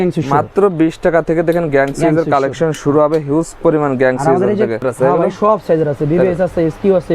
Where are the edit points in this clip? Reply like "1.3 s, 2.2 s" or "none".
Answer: 4.9 s